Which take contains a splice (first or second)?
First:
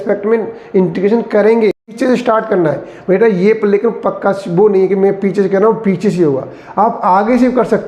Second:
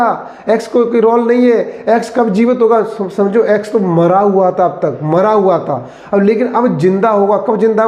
first